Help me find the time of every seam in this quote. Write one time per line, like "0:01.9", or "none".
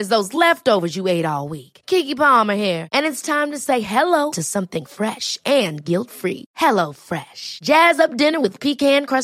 none